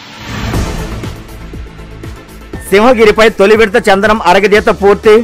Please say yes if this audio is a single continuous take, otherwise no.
no